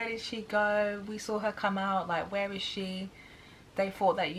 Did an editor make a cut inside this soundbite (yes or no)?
no